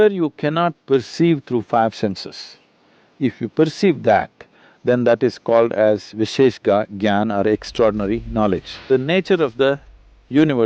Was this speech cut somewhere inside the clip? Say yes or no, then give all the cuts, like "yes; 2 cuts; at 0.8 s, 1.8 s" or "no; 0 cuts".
yes; 1 cut; at 8.7 s